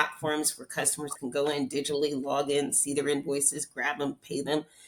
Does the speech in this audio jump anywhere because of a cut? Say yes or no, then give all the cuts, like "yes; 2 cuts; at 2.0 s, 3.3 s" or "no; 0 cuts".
no; 0 cuts